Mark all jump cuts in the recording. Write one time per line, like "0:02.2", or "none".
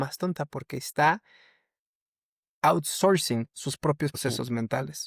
0:04.2